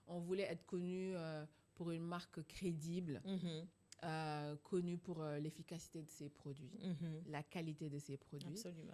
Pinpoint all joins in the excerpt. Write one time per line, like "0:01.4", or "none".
none